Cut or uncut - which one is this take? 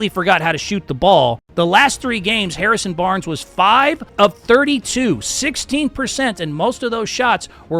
cut